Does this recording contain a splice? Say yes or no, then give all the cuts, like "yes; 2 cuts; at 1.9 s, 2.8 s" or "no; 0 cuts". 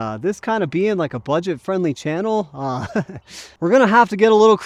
no; 0 cuts